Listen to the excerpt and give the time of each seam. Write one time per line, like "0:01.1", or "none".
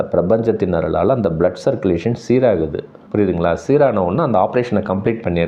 none